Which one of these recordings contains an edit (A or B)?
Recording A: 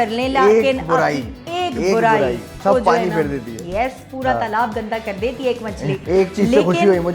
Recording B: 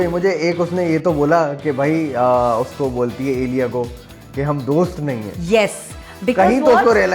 A